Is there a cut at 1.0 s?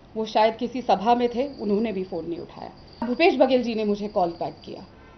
no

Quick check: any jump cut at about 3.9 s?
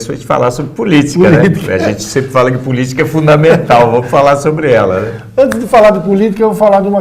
yes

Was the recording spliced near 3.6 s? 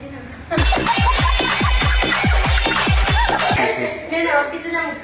yes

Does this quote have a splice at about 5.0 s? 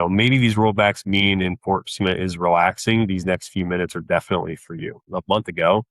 yes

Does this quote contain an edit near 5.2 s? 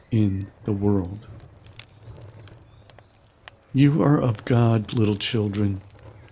no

